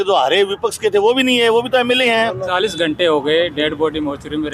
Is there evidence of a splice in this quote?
yes; 1 cut; at 2.4 s

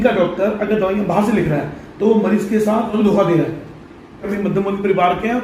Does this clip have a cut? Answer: yes; 2 cuts; at 2.9 s, 4.3 s

